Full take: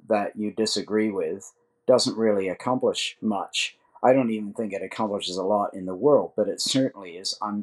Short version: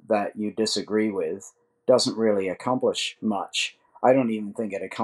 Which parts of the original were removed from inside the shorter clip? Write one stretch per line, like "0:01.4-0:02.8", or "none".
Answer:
none